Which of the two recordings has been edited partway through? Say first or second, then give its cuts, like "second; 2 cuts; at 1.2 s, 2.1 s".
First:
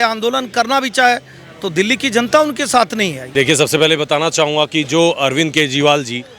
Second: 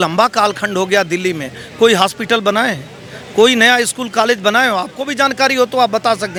first; 1 cut; at 3.2 s